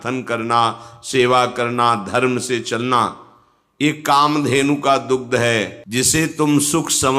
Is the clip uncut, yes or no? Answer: no